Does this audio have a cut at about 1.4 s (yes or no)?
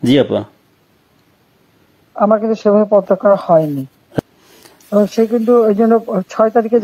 no